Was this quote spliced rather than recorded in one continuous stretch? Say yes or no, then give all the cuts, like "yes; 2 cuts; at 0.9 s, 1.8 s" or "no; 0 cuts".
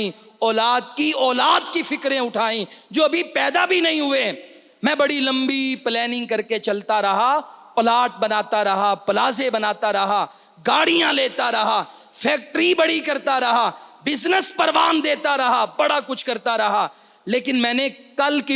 no; 0 cuts